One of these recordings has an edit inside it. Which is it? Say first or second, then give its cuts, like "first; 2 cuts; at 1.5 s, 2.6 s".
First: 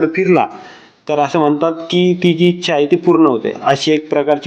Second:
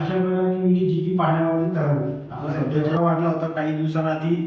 second; 1 cut; at 2.7 s